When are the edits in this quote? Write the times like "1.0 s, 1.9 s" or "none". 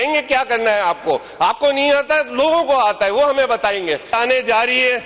4.1 s